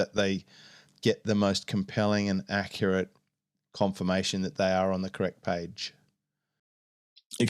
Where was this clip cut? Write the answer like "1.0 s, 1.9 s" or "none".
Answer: none